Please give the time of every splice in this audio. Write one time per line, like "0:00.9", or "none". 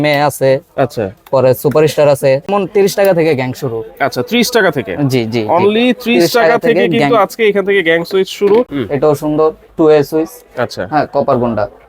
0:02.5
0:08.8